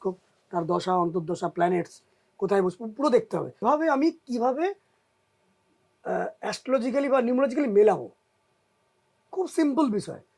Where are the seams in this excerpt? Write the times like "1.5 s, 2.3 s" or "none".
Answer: 3.6 s